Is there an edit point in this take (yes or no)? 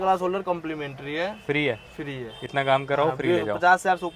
no